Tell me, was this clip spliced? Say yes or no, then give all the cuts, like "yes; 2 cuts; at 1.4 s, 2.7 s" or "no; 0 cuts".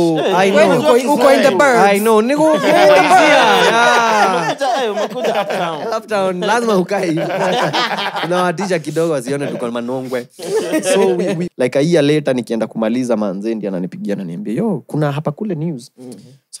yes; 1 cut; at 11.5 s